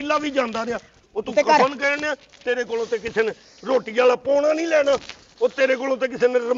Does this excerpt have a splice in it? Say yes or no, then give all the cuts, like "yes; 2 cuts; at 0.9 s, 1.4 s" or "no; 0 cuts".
no; 0 cuts